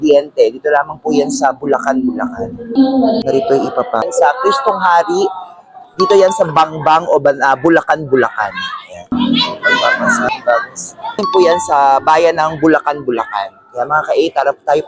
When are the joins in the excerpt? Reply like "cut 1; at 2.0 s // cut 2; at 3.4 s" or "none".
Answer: cut 1; at 2.8 s // cut 2; at 4.1 s // cut 3; at 9.1 s // cut 4; at 11.2 s